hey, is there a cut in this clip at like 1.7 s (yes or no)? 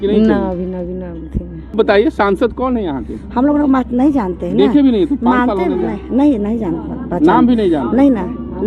yes